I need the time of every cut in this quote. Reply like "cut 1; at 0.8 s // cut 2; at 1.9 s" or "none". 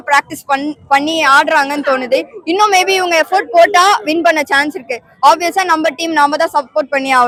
none